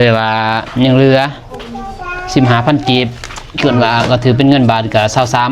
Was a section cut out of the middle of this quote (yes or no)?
no